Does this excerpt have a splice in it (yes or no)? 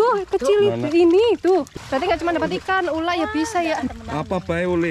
yes